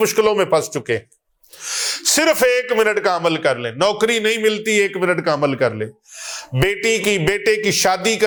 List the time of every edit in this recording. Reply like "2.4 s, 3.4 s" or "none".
none